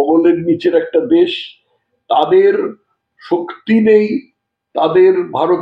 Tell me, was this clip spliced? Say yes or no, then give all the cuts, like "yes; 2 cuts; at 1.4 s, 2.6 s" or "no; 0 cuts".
no; 0 cuts